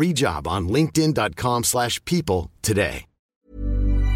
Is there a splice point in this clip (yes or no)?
yes